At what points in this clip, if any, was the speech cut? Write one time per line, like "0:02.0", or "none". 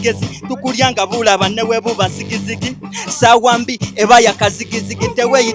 none